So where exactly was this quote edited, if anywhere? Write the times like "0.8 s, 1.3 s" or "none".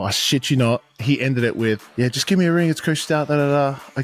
1.9 s